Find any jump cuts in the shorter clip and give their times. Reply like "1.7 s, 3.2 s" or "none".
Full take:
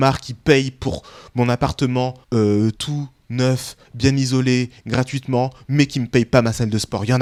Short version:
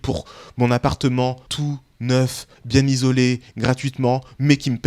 1.5 s